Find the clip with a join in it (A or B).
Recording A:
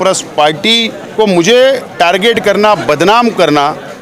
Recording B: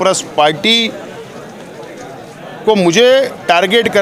A